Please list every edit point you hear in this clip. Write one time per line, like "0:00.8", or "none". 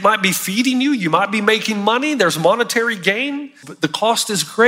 0:03.6